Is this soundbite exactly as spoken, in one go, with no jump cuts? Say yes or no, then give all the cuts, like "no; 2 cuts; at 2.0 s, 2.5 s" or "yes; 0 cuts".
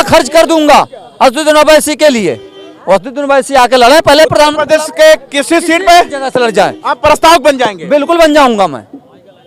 yes; 0 cuts